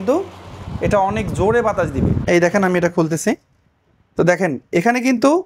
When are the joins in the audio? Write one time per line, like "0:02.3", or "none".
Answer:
0:02.2